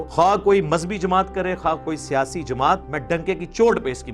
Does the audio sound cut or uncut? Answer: cut